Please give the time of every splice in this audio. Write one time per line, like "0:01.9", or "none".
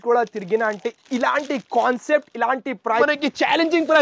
0:03.0